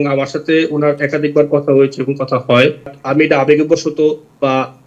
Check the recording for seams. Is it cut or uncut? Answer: cut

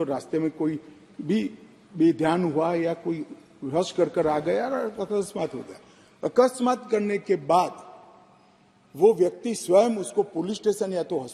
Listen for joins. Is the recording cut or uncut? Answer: uncut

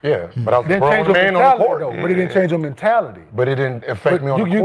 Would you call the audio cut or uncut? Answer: uncut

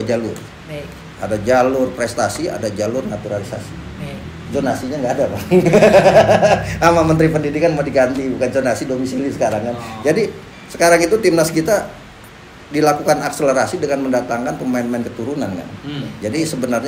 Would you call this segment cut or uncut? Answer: uncut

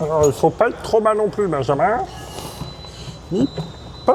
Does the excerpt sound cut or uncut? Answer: uncut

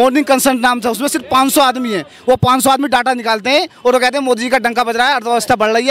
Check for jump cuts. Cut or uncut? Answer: uncut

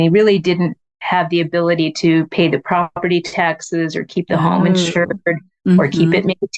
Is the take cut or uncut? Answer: uncut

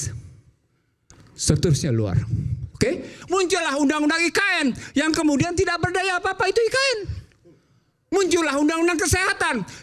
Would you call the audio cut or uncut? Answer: cut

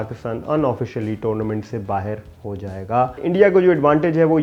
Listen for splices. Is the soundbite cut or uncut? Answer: cut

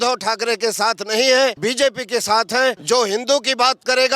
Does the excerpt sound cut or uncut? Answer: cut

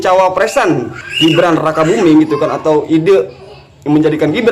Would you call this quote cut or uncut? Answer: uncut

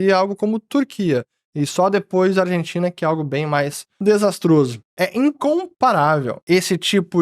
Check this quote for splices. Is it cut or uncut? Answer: cut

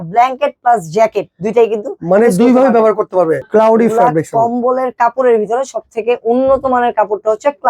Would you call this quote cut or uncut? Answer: cut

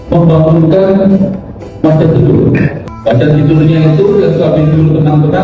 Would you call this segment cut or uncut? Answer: cut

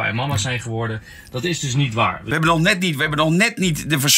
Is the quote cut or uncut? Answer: cut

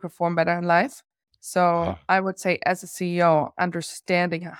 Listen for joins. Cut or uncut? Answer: uncut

